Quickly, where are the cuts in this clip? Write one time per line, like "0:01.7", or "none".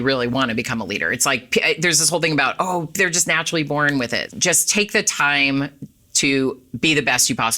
0:04.3

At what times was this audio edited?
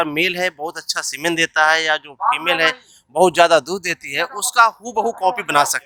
none

